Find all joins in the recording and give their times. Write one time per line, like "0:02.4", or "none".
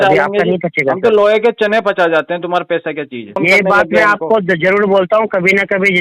0:03.4